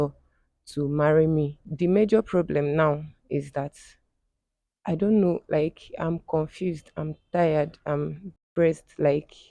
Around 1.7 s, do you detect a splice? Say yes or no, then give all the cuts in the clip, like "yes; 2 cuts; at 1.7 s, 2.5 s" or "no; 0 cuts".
yes; 1 cut; at 1.7 s